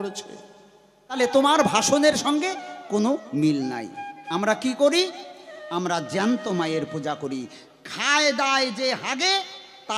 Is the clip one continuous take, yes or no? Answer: no